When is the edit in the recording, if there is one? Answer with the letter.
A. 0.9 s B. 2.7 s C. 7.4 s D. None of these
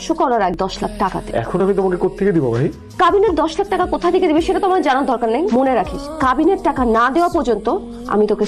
A